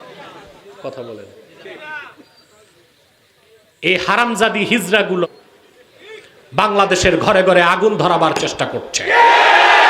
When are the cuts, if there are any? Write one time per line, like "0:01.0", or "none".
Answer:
0:05.2